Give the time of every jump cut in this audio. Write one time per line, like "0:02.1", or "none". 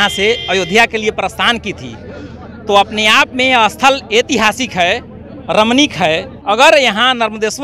0:06.3